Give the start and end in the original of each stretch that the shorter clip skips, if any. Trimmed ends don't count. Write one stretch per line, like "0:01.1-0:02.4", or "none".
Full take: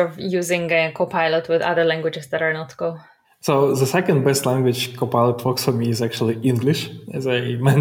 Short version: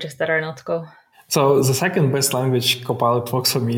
none